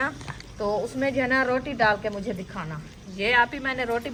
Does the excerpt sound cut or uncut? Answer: uncut